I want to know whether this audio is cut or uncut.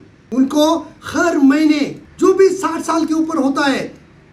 cut